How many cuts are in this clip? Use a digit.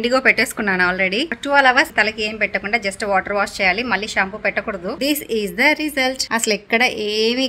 2